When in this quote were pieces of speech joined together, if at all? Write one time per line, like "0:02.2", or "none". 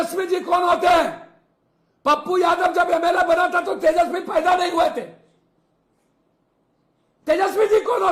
none